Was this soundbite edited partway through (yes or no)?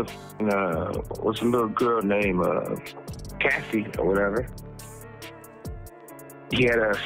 no